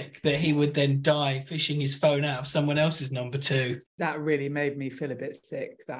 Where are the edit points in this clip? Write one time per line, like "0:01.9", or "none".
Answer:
0:03.8